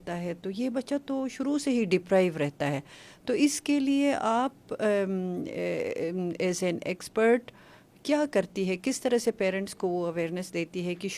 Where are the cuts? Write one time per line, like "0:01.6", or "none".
none